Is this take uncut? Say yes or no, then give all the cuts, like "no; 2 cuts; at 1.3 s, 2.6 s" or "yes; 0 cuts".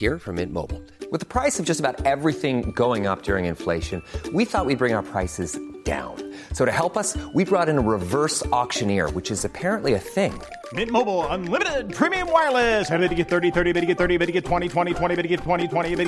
yes; 0 cuts